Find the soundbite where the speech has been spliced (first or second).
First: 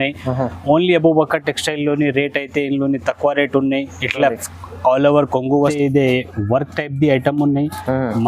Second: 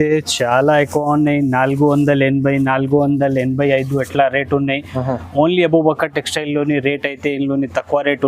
first